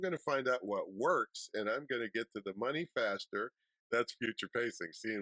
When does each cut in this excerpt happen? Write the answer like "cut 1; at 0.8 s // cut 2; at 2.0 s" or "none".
cut 1; at 3.7 s